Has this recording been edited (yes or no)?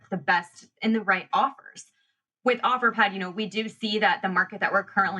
yes